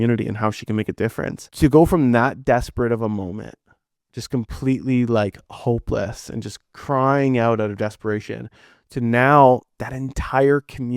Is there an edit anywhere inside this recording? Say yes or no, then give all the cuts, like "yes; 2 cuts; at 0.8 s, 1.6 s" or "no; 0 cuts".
yes; 1 cut; at 1.4 s